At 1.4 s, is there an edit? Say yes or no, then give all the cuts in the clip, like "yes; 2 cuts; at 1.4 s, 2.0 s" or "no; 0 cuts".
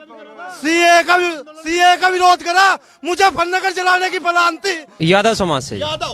no; 1 cut; at 4.9 s